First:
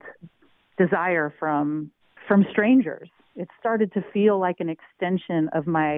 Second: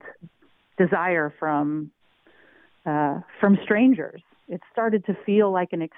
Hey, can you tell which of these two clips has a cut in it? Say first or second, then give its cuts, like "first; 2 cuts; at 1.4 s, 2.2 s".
first; 1 cut; at 2.1 s